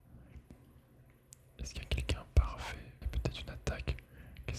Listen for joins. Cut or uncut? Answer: cut